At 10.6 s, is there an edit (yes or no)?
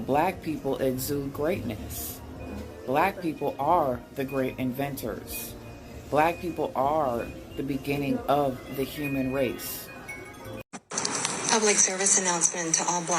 yes